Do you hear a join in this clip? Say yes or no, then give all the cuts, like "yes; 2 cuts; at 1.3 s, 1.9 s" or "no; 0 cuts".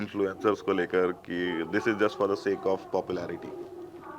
no; 0 cuts